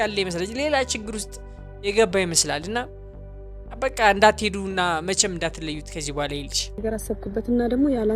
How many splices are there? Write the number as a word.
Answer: one